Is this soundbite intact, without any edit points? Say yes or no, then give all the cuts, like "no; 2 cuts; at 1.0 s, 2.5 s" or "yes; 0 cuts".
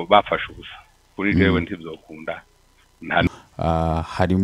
no; 1 cut; at 3.3 s